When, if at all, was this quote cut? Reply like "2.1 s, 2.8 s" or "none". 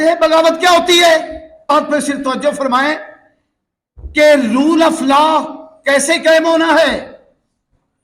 1.7 s